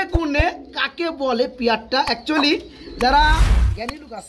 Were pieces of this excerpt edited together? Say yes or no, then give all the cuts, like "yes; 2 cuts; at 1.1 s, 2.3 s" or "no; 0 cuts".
no; 0 cuts